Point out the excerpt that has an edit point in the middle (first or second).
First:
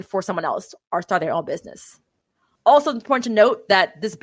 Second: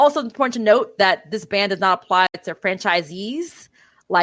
second